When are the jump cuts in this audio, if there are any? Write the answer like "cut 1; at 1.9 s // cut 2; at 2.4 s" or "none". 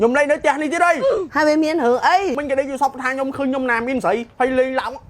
cut 1; at 2.4 s // cut 2; at 4.2 s

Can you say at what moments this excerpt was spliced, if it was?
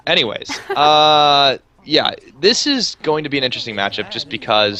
none

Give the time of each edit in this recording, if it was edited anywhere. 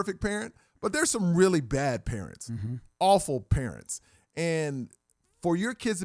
none

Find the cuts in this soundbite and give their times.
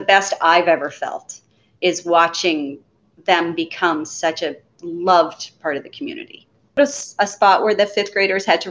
cut 1; at 6.8 s

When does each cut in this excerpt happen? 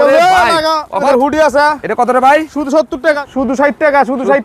cut 1; at 1.1 s // cut 2; at 3.2 s

